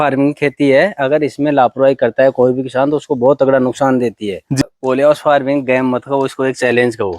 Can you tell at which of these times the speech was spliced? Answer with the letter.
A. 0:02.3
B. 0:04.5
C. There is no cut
B